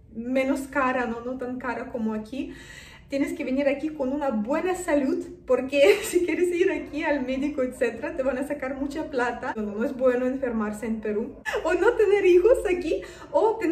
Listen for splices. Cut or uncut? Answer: cut